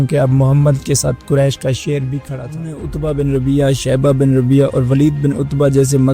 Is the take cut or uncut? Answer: cut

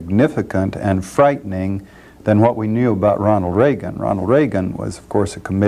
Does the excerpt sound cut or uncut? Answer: uncut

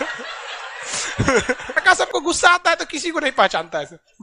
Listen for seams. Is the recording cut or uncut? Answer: cut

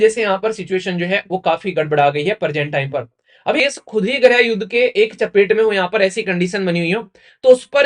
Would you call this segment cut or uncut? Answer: cut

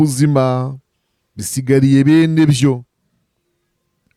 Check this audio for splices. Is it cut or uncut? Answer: uncut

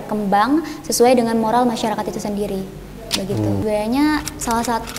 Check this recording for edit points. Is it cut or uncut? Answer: cut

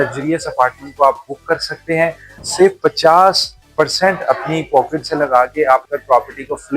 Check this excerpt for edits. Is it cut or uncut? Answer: cut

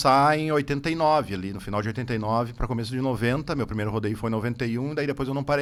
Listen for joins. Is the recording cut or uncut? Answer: uncut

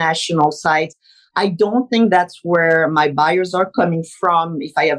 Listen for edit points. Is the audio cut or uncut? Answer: cut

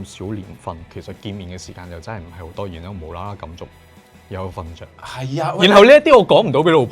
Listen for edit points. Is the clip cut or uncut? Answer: cut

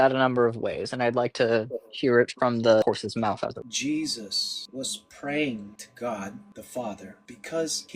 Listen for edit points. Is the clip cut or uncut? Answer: cut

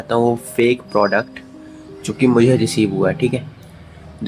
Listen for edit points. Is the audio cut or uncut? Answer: uncut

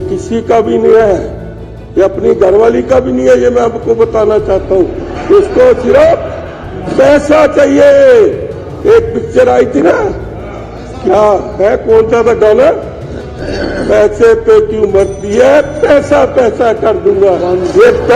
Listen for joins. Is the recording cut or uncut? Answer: uncut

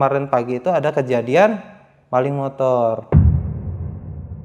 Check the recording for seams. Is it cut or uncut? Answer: cut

